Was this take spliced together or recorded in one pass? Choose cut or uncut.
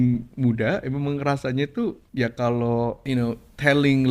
cut